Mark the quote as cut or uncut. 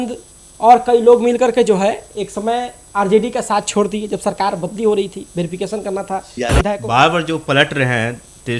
cut